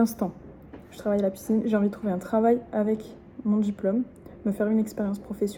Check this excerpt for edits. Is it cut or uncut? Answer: uncut